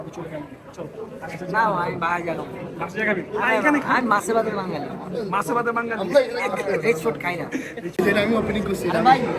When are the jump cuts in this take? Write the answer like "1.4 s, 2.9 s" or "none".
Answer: 8.0 s